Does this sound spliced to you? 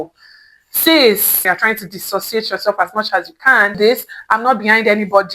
yes; 2 cuts; at 1.4 s, 3.7 s

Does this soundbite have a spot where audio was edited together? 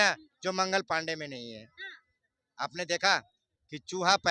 no; 0 cuts

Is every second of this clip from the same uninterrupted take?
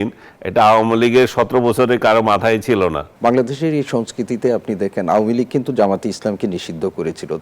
no; 1 cut; at 3.1 s

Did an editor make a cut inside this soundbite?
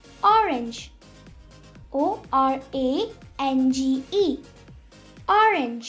no; 0 cuts

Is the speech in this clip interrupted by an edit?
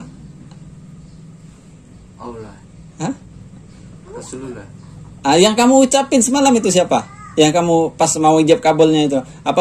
no; 0 cuts

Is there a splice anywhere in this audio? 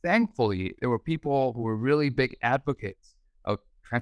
no; 0 cuts

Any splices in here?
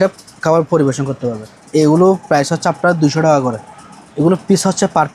yes; 2 cuts; at 1.6 s, 3.7 s

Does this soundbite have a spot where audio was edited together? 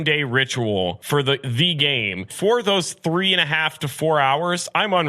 yes; 2 cuts; at 1.0 s, 2.3 s

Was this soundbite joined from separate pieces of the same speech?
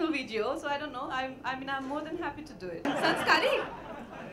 yes; 1 cut; at 2.9 s

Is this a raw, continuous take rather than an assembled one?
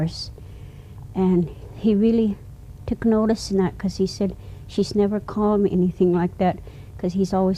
no; 1 cut; at 4.6 s

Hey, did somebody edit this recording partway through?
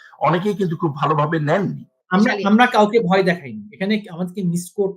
yes; 1 cut; at 1.9 s

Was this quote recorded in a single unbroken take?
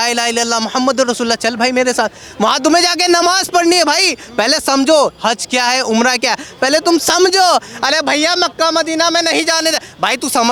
yes; 0 cuts

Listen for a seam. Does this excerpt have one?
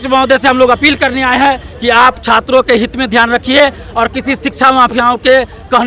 no; 0 cuts

